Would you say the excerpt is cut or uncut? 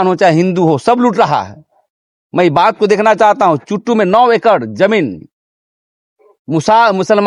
uncut